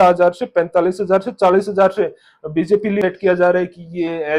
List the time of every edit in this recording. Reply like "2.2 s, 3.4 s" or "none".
3.0 s